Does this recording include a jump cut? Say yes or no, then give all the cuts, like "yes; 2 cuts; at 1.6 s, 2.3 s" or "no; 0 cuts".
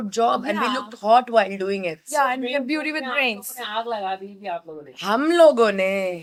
no; 0 cuts